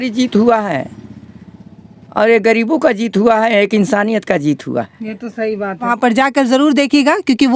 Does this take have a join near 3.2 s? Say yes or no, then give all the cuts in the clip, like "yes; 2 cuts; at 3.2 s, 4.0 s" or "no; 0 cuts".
no; 1 cut; at 5.9 s